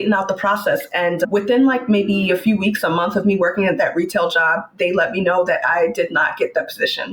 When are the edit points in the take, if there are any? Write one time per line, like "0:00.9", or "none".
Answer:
0:01.3

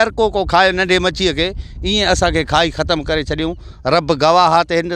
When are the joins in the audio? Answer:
none

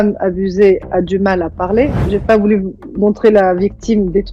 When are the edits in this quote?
0:02.0

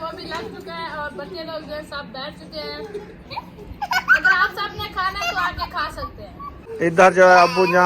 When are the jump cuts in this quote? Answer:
0:06.6

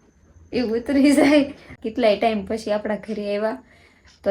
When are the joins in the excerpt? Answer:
0:01.8

